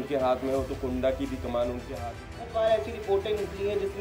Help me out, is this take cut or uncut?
cut